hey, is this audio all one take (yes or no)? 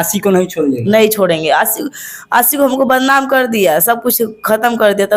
yes